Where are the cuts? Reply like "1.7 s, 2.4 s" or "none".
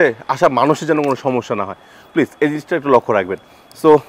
none